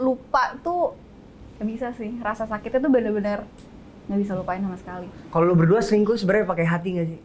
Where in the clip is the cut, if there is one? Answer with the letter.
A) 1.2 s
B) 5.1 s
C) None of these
B